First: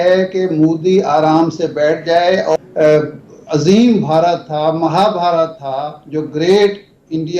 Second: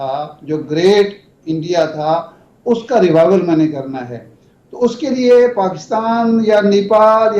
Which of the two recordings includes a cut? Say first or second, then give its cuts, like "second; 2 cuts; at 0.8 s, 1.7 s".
first; 1 cut; at 2.6 s